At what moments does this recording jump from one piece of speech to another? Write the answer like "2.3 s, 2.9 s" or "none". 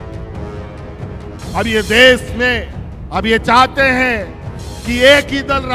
1.5 s